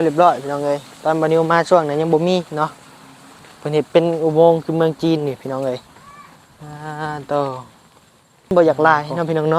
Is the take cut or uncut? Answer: cut